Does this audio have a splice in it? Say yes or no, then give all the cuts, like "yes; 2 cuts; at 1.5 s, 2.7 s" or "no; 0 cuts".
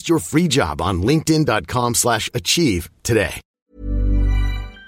yes; 1 cut; at 3.4 s